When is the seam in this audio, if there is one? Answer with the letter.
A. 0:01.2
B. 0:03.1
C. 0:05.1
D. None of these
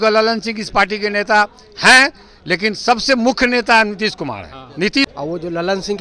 C